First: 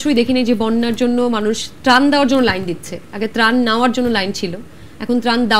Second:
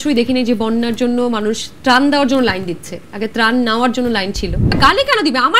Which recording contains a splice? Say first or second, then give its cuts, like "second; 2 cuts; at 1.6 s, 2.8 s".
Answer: second; 1 cut; at 4.7 s